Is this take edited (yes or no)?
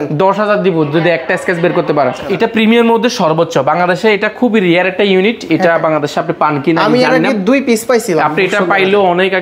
yes